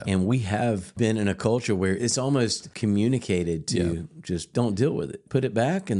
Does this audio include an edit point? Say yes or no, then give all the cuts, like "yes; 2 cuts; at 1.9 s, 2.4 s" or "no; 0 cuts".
yes; 4 cuts; at 1.0 s, 2.3 s, 4.5 s, 5.2 s